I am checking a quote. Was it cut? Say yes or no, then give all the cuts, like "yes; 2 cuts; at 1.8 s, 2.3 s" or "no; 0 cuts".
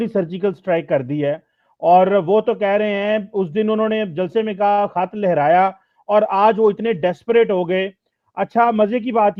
no; 0 cuts